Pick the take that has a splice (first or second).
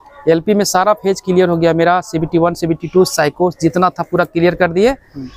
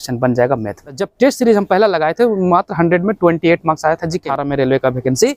second